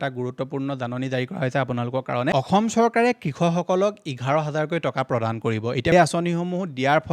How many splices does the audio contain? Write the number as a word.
two